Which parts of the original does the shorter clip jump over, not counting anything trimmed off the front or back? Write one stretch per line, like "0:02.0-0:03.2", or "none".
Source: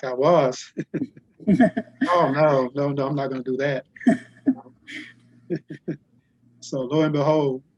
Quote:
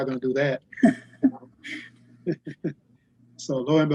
none